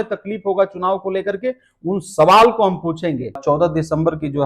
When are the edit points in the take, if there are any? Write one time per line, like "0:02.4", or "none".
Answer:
0:03.4